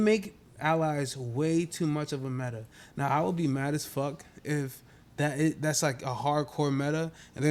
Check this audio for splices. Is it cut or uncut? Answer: uncut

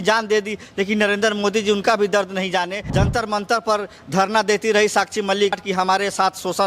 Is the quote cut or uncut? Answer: cut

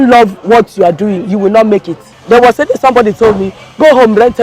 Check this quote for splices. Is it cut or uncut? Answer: cut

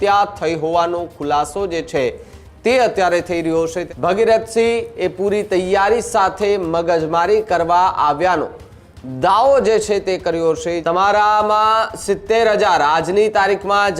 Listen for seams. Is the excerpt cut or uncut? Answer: cut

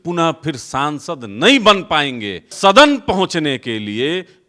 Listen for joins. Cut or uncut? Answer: cut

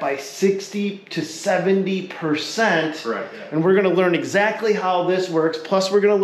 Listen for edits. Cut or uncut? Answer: cut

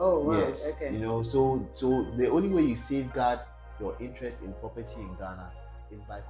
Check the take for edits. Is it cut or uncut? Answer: uncut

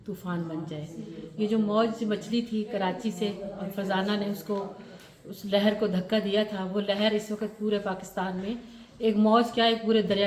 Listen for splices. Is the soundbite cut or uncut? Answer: uncut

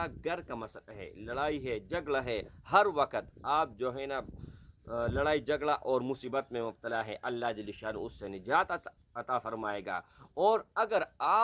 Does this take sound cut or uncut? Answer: uncut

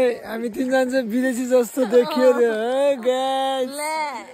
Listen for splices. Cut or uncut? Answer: uncut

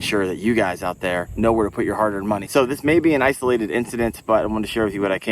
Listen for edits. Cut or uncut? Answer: cut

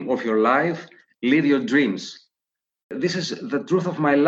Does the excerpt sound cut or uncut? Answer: cut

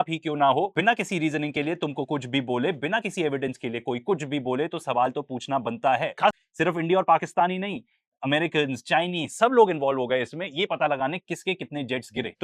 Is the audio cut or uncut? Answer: cut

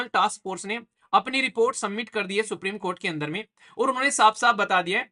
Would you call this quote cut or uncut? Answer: uncut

